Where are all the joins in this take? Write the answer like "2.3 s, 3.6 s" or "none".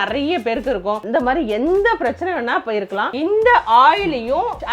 1.0 s, 3.1 s